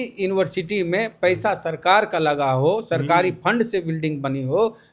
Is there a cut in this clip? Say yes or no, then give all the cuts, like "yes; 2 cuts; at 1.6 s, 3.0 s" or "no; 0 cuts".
no; 0 cuts